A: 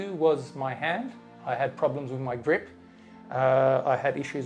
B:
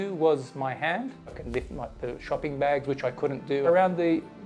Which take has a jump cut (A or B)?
B